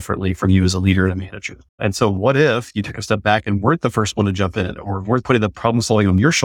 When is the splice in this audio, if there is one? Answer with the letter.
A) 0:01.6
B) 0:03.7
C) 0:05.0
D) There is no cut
A